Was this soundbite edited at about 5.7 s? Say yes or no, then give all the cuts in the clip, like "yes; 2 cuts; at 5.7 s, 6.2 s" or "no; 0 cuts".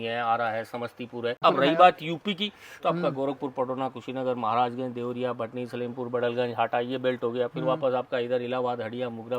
no; 1 cut; at 1.4 s